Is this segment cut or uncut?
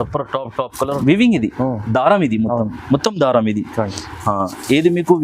cut